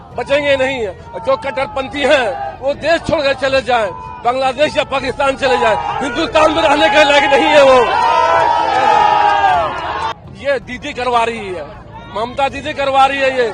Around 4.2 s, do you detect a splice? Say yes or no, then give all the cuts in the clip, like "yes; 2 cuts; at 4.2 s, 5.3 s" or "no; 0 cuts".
no; 1 cut; at 10.2 s